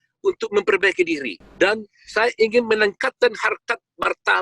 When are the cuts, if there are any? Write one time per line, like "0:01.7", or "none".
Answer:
0:01.4